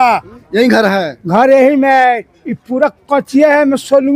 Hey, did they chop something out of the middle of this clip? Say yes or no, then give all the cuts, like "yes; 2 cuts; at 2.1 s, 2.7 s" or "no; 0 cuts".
no; 0 cuts